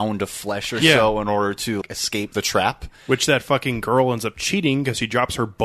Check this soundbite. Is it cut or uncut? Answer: cut